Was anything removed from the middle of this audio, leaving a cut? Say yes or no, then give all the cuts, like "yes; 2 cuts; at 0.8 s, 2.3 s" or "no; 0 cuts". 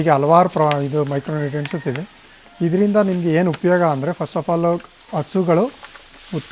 no; 0 cuts